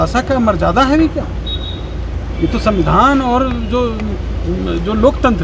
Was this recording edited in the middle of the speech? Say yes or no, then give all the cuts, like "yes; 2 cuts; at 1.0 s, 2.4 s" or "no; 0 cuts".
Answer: no; 0 cuts